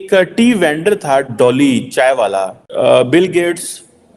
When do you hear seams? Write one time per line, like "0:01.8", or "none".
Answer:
0:02.6